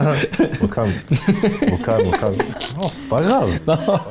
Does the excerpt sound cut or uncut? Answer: cut